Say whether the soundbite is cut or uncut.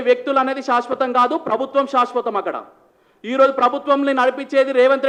uncut